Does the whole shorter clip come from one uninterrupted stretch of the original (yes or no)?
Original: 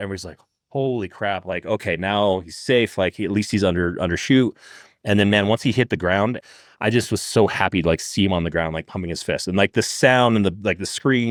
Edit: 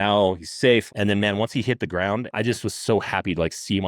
no